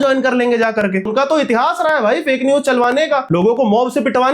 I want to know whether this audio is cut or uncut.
cut